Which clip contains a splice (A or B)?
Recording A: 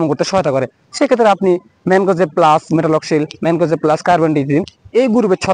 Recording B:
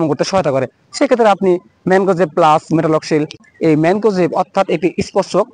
B